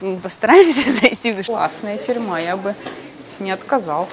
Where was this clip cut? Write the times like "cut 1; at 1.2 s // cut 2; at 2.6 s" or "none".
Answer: cut 1; at 1.4 s